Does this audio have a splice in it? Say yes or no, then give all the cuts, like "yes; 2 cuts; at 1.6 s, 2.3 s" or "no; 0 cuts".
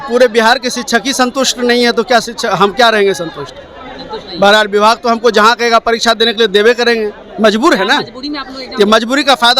no; 0 cuts